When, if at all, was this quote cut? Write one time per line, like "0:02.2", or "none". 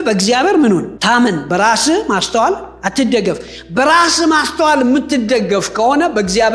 0:00.9